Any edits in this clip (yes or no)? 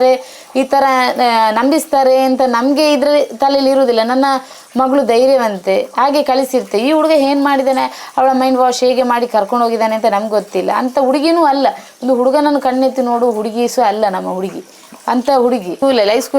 no